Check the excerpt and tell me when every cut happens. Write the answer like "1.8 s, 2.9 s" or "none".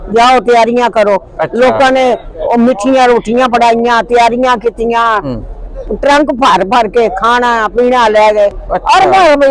8.6 s